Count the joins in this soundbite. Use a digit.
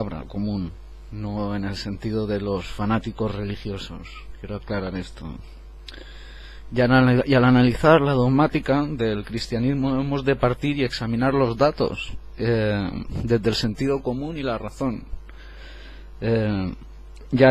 1